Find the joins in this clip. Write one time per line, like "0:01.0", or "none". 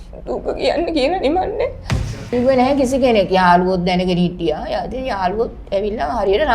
0:02.3